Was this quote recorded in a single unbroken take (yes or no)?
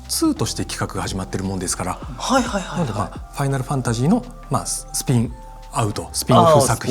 yes